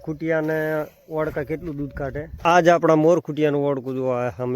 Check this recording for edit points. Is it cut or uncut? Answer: cut